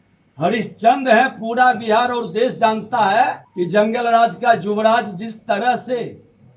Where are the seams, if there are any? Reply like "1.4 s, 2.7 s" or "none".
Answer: 3.4 s